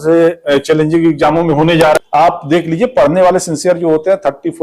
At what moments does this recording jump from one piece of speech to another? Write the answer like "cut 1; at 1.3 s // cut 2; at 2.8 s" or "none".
cut 1; at 2.0 s